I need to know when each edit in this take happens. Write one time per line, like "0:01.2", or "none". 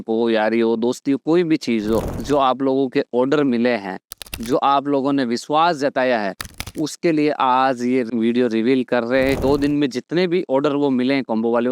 0:02.1
0:09.4